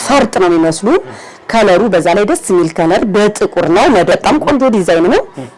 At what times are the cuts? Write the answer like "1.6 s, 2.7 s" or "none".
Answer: 4.1 s